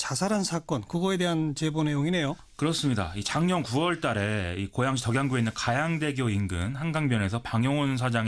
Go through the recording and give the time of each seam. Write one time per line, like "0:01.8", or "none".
0:01.2